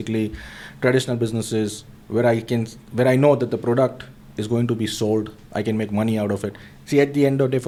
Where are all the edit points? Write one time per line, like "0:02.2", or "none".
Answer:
none

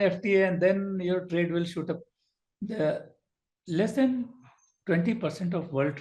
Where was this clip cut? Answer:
none

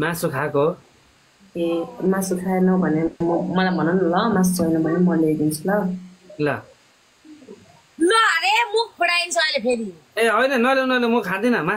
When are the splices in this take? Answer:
none

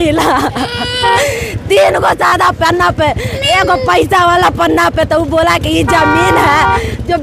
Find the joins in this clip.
none

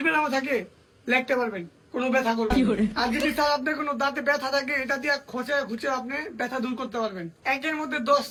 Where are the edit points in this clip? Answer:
none

